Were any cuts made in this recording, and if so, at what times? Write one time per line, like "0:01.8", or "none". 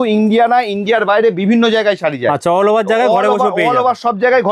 none